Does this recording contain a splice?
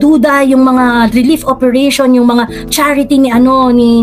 no; 0 cuts

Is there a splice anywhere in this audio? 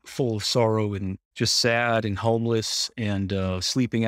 yes; 1 cut; at 1.2 s

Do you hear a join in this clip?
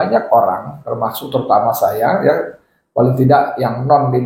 no; 0 cuts

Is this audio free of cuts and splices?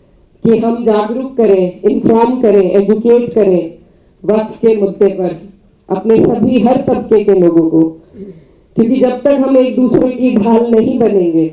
yes; 0 cuts

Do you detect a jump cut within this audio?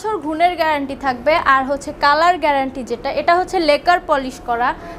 no; 0 cuts

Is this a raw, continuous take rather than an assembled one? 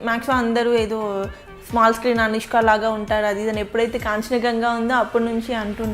yes; 0 cuts

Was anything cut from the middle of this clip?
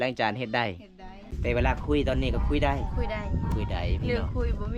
yes; 1 cut; at 1.2 s

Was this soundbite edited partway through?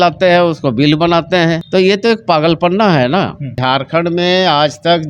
yes; 2 cuts; at 1.6 s, 3.6 s

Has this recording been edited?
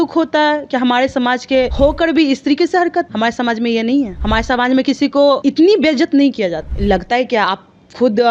yes; 5 cuts; at 1.7 s, 3.1 s, 4.2 s, 5.4 s, 6.7 s

